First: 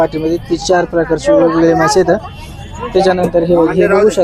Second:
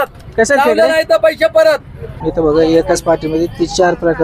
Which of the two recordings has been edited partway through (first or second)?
second